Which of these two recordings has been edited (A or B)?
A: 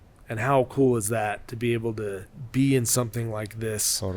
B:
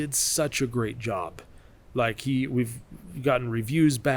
A